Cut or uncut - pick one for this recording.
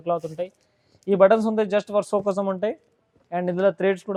uncut